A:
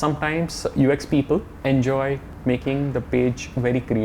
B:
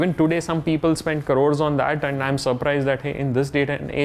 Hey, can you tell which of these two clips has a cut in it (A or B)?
A